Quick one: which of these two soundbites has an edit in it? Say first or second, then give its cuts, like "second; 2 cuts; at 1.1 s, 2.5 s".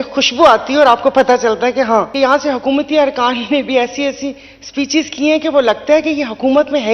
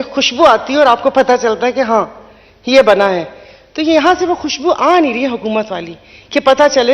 first; 1 cut; at 2.1 s